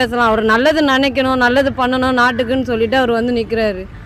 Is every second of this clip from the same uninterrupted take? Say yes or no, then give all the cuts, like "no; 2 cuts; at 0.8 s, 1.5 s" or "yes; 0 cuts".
yes; 0 cuts